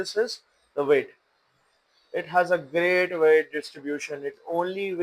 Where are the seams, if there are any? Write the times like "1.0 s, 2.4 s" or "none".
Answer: none

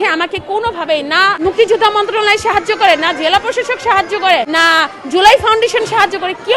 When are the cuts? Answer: 1.4 s, 4.5 s

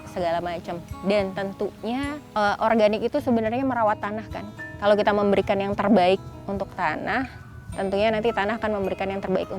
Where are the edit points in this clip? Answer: 0.9 s, 2.2 s, 6.3 s

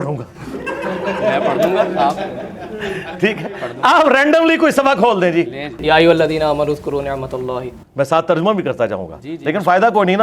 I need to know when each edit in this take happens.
5.8 s, 7.8 s

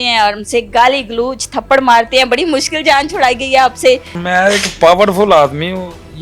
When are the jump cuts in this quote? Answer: 4.1 s

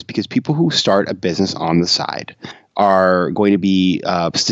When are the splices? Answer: 2.6 s

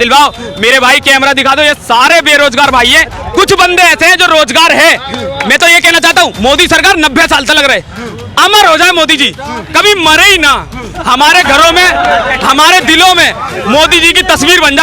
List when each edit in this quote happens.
none

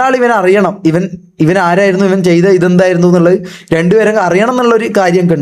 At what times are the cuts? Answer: none

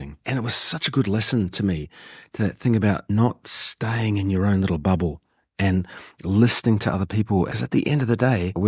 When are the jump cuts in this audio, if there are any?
7.5 s

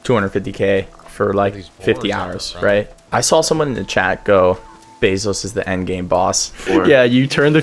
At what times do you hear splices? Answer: 3.0 s, 6.6 s

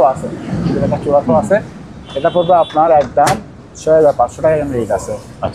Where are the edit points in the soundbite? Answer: none

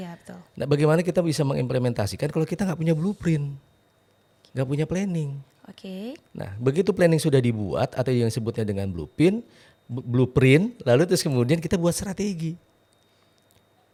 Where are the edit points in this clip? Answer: none

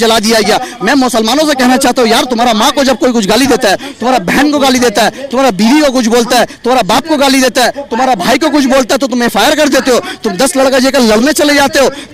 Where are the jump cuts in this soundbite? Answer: none

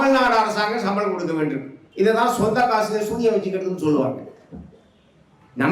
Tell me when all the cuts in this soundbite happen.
1.8 s

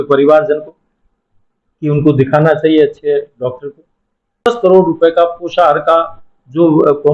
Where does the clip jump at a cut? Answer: 4.5 s

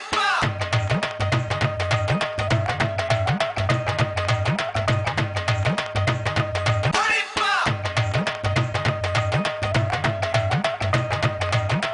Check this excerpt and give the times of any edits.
10.6 s

